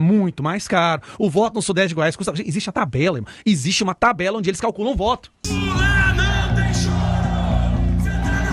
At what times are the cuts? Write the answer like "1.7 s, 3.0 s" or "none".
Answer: 5.4 s